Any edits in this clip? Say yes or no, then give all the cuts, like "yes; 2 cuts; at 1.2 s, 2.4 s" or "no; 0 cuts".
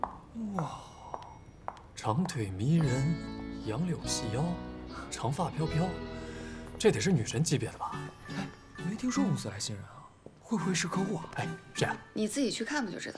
no; 0 cuts